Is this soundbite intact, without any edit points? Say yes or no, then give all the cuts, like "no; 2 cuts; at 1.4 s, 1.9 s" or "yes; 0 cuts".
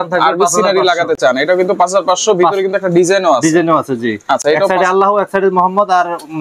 yes; 0 cuts